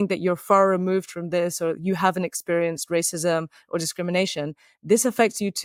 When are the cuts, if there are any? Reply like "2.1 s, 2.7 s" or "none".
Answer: none